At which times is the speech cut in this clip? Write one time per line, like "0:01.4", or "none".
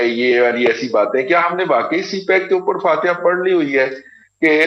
none